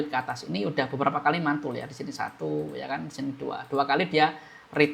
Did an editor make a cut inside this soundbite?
no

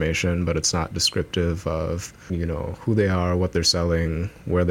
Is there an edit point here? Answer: yes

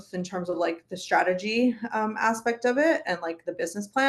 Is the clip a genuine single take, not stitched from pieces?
yes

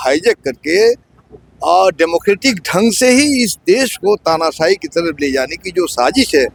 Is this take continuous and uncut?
yes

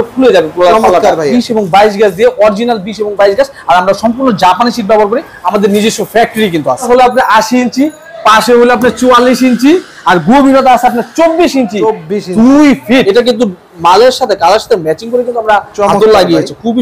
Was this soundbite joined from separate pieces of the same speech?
yes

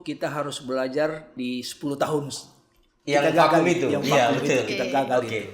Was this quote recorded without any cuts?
no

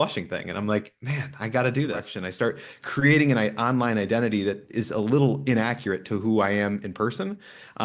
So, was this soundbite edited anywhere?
yes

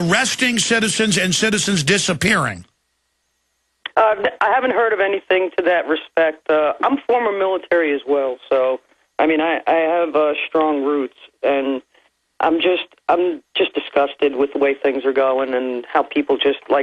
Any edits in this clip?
no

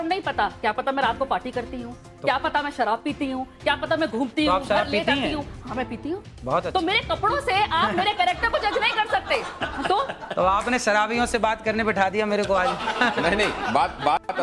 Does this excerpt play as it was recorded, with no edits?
yes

